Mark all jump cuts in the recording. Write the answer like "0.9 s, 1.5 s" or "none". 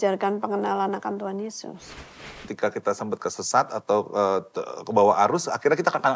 2.3 s

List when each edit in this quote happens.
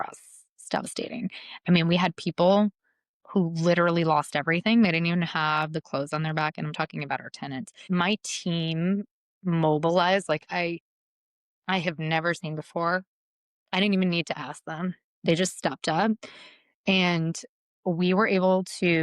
7.9 s

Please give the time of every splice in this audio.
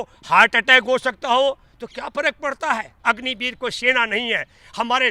2.9 s

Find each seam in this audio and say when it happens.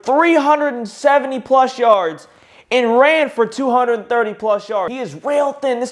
5.0 s

